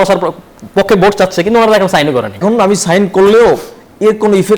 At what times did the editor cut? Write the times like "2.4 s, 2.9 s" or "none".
2.4 s